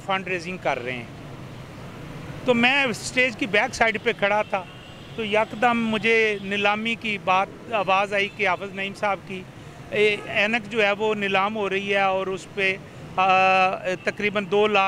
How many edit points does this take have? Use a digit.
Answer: 0